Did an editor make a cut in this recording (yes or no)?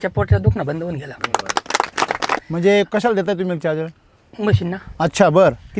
yes